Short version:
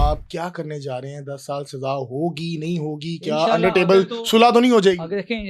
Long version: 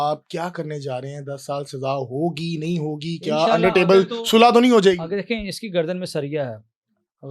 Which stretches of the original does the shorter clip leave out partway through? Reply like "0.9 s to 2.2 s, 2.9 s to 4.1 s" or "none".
none